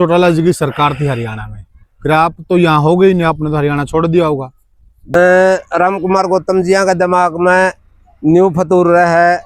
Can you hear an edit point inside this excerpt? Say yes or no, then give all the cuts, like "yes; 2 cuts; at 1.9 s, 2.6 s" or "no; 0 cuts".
yes; 1 cut; at 5.1 s